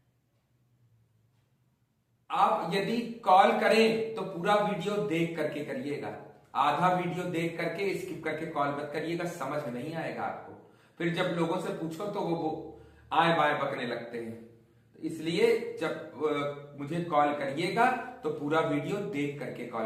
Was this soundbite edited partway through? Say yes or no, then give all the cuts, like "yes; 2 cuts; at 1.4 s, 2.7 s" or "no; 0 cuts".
no; 0 cuts